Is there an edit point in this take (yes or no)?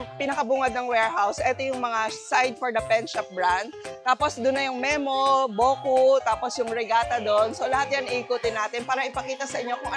no